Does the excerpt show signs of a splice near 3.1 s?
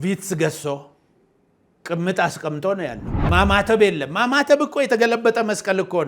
yes; 1 cut; at 3.1 s

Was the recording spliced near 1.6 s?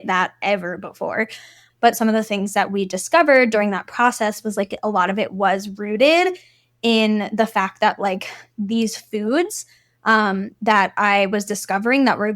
yes; 1 cut; at 1.6 s

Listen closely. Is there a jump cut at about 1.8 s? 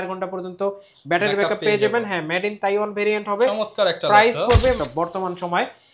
no; 1 cut; at 4.8 s

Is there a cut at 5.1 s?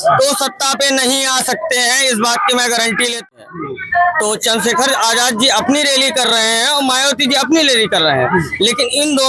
no; 1 cut; at 3.5 s

